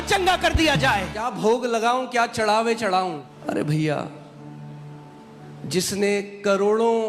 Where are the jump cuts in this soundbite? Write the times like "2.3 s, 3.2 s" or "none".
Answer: 1.2 s, 3.3 s